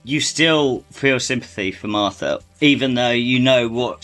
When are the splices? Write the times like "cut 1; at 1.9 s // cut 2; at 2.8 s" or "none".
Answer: cut 1; at 0.9 s // cut 2; at 2.4 s